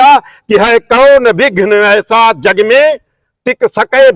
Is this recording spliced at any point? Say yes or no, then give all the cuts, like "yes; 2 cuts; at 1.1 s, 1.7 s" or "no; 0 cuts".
no; 0 cuts